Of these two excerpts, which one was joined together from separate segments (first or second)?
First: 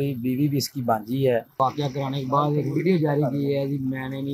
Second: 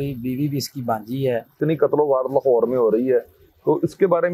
second